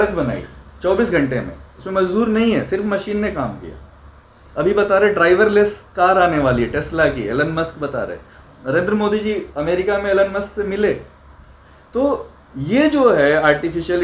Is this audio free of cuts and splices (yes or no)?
yes